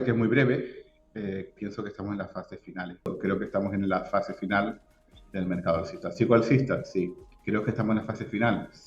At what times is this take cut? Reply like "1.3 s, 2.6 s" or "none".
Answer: 3.1 s